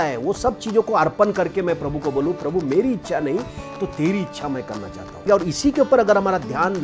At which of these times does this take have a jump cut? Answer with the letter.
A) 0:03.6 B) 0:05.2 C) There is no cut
B